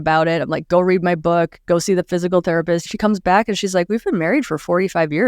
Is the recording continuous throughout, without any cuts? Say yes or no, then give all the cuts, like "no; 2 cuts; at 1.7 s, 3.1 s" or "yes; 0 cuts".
no; 1 cut; at 2.9 s